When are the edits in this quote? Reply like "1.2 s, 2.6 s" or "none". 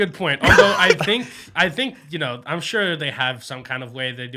none

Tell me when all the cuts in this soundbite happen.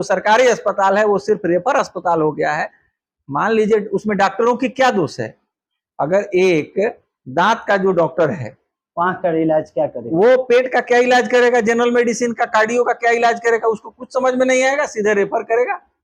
none

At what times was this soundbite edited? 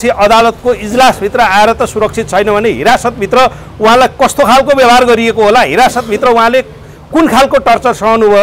none

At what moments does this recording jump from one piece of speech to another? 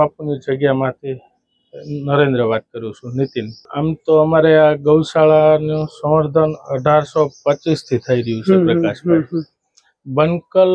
3.6 s

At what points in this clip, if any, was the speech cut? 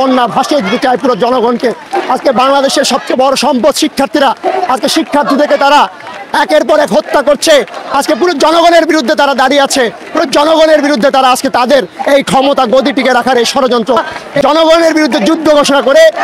14.2 s

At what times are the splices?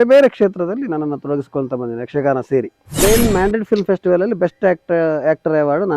2.8 s

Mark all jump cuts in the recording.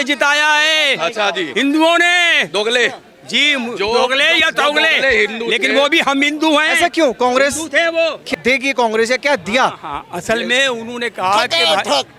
8.3 s

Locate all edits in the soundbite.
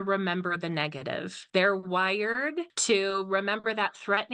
1.3 s, 2.7 s

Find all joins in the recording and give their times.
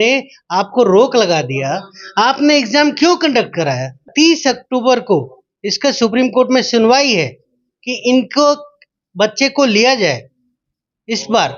4.1 s

